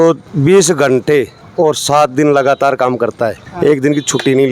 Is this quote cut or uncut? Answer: uncut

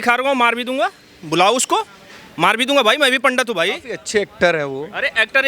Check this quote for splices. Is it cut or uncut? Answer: uncut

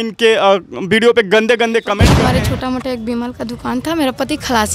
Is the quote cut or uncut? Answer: cut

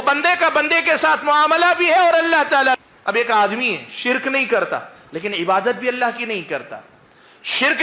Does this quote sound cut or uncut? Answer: cut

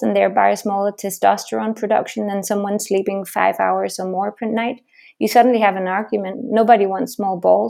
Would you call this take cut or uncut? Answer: uncut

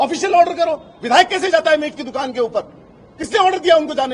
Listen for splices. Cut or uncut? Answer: uncut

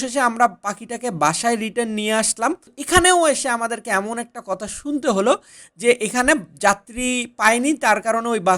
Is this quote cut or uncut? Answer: cut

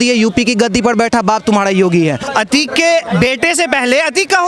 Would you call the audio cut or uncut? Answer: cut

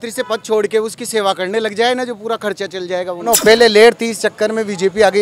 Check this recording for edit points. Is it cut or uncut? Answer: cut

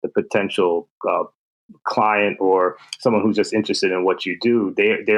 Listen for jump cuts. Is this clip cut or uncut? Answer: uncut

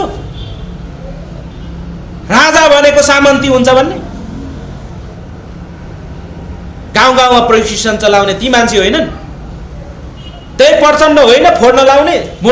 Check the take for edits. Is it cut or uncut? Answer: uncut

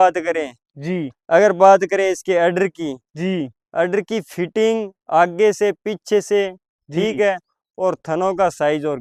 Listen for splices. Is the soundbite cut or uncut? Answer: uncut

